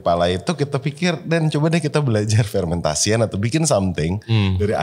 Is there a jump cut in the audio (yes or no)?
no